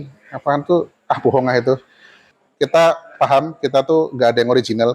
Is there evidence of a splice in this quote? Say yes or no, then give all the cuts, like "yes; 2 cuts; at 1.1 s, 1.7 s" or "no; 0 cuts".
yes; 1 cut; at 2.3 s